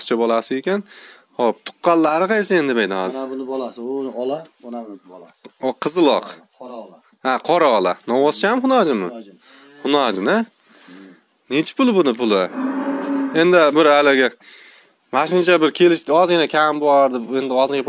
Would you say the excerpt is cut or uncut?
uncut